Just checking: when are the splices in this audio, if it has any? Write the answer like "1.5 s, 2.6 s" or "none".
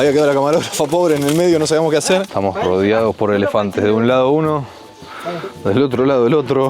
2.3 s